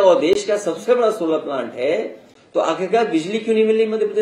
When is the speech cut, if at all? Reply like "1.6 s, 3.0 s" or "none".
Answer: none